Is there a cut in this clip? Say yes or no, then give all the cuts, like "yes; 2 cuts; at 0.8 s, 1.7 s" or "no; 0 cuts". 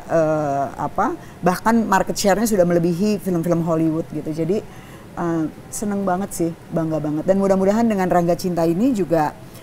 no; 0 cuts